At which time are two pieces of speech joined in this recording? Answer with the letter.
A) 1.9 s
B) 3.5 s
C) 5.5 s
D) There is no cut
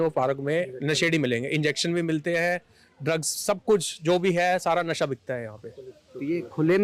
D